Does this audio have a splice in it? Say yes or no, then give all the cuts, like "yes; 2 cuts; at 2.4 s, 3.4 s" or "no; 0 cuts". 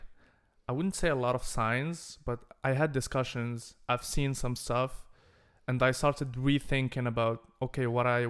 no; 0 cuts